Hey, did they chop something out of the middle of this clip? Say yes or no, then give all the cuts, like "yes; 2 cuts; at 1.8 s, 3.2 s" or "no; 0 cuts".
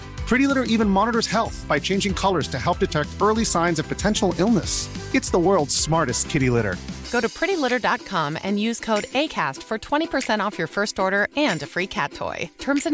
no; 0 cuts